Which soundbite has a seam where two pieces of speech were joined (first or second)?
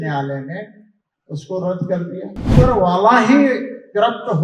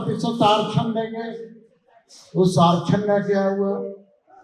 first